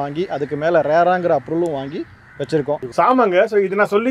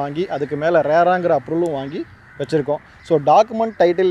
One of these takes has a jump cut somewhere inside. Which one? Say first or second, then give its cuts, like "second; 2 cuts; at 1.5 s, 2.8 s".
first; 1 cut; at 2.9 s